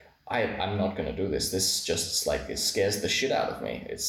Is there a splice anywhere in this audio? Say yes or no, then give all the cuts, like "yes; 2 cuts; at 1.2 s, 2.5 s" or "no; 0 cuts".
no; 0 cuts